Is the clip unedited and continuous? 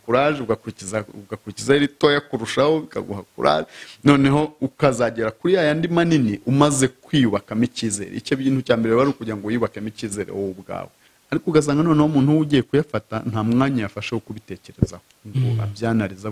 no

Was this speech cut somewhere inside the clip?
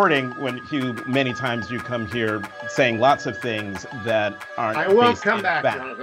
no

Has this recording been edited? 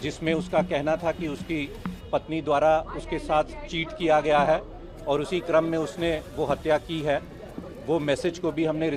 no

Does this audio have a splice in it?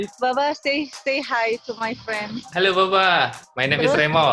yes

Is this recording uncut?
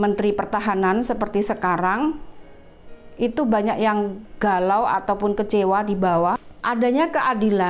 no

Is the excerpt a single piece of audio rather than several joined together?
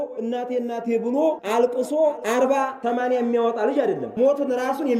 no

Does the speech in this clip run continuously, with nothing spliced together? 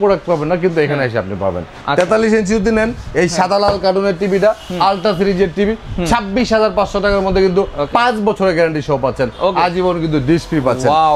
yes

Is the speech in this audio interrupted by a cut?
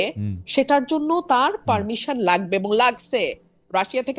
no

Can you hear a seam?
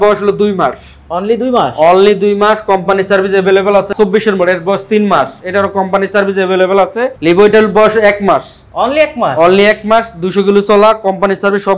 yes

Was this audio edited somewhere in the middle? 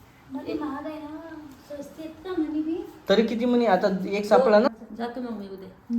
yes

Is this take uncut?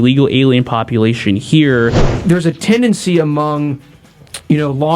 no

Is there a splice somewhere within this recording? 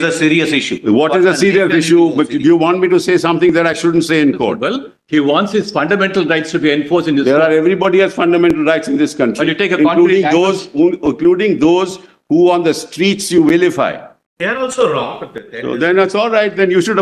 no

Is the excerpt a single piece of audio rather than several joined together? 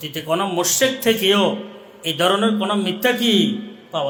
yes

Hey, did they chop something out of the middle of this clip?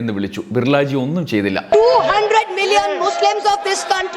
yes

